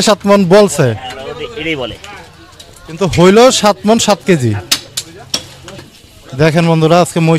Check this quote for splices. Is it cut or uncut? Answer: cut